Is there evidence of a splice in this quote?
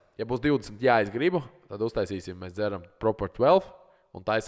no; 0 cuts

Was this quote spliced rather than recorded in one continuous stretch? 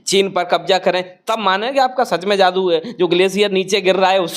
no; 0 cuts

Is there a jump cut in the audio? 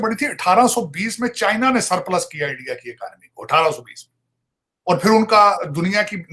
no; 0 cuts

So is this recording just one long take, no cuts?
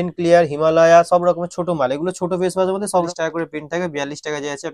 no; 1 cut; at 3.1 s

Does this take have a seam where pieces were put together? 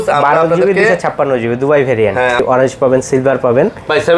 yes; 1 cut; at 2.4 s

